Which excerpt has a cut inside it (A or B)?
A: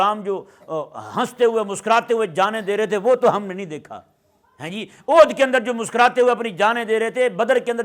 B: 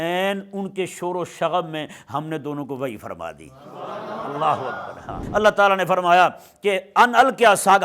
B